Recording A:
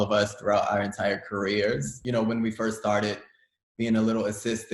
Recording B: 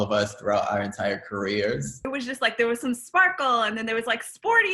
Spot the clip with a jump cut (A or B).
B